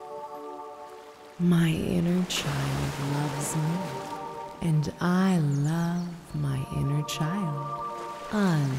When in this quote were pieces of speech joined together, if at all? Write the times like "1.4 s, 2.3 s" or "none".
0.9 s